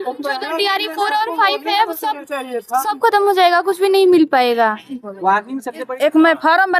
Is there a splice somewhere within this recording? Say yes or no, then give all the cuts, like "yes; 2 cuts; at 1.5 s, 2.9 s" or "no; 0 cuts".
yes; 1 cut; at 5.8 s